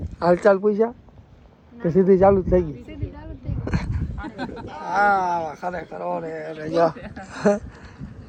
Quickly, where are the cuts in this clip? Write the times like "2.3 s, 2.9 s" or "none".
none